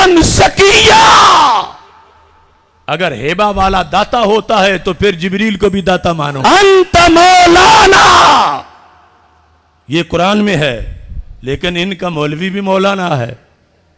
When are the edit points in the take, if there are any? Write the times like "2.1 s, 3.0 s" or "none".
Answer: 6.3 s

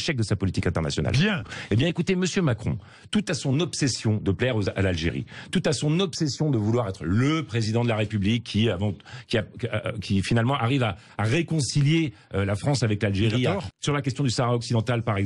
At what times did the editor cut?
1.5 s, 13.7 s

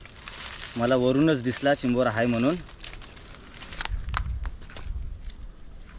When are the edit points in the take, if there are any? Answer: 3.8 s

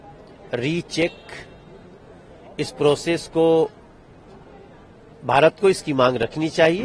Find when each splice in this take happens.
none

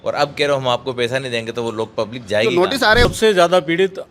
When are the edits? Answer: 3.1 s

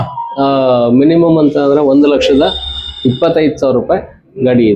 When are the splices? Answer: none

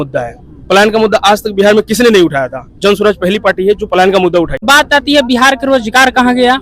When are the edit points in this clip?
4.6 s

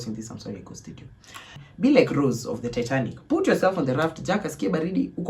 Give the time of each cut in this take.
1.6 s

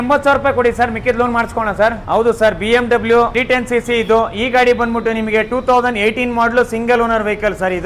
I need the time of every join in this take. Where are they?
2.0 s, 3.3 s

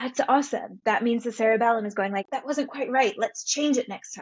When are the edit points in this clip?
2.3 s

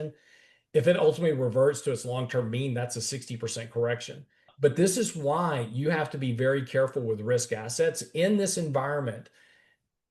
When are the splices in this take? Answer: 4.4 s

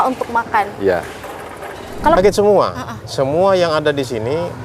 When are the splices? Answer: 2.2 s

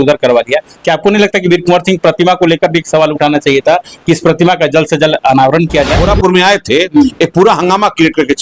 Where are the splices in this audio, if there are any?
6.0 s

